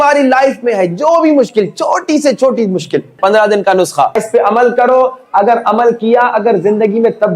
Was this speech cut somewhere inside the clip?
yes; 2 cuts; at 3.2 s, 4.2 s

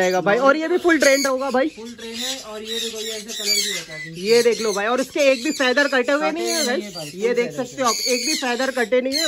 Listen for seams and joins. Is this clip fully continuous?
yes; 0 cuts

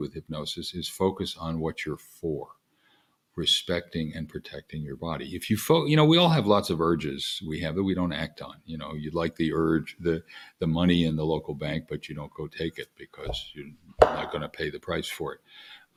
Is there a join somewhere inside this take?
no; 0 cuts

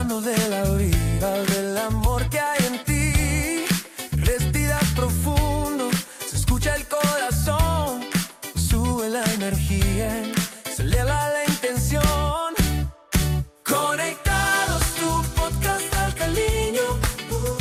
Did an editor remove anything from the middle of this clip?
no; 0 cuts

